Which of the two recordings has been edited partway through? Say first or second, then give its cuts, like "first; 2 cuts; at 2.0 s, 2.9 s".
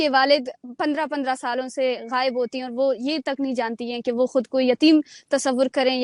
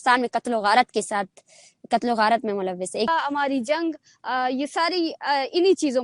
second; 1 cut; at 3.1 s